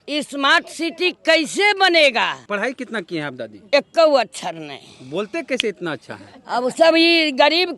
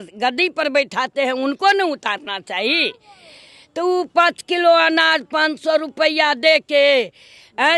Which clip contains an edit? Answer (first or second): first